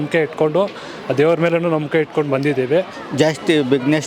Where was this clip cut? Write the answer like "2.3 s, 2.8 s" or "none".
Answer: 3.0 s